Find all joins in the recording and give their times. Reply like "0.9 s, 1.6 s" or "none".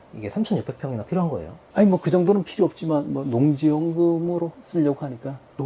1.5 s, 4.6 s